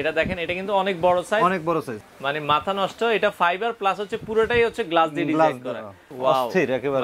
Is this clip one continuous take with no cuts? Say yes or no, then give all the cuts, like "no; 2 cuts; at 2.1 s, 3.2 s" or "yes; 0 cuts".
no; 2 cuts; at 2.0 s, 6.1 s